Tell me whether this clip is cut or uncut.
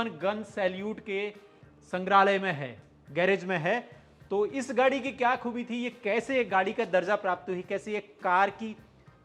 uncut